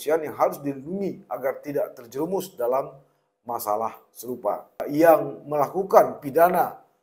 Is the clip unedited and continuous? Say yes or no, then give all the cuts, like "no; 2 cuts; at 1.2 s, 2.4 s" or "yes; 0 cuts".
no; 1 cut; at 4.8 s